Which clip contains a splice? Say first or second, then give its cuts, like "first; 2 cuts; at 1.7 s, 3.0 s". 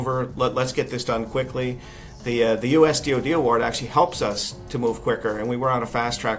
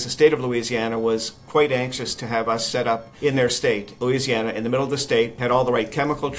second; 3 cuts; at 3.1 s, 4.0 s, 5.3 s